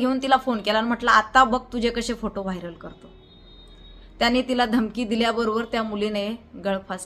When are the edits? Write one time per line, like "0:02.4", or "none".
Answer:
none